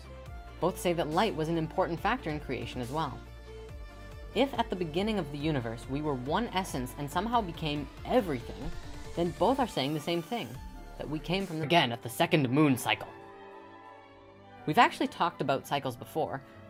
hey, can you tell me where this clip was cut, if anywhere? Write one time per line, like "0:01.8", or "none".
none